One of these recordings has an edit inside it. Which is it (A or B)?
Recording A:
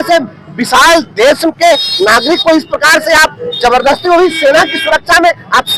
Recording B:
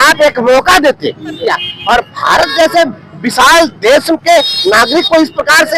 B